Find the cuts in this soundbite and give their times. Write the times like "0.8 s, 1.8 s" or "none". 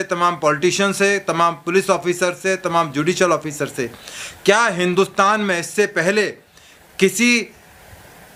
none